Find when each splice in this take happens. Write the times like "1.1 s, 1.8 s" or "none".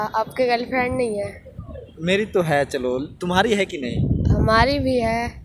none